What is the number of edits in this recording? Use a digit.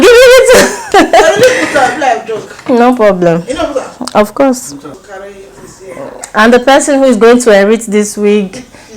1